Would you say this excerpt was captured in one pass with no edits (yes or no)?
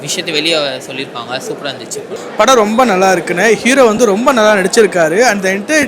no